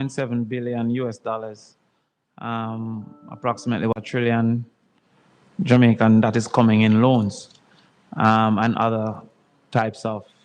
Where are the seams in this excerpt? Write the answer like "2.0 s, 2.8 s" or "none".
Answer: 4.0 s